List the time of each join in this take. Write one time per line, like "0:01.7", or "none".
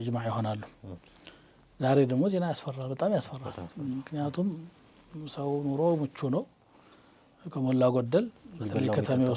none